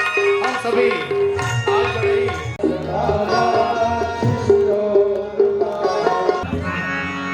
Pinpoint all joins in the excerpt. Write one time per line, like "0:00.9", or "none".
0:02.5
0:06.4